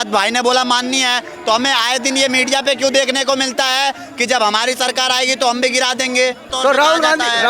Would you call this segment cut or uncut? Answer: cut